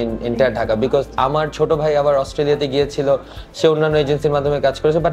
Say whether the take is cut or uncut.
uncut